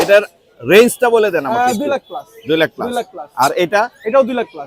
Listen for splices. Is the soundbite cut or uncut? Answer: uncut